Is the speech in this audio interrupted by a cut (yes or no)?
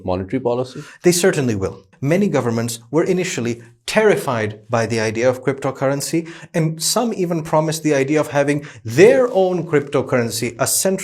yes